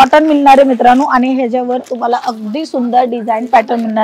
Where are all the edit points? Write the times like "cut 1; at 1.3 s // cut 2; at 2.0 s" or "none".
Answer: none